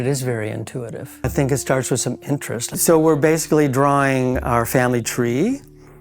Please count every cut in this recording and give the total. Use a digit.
2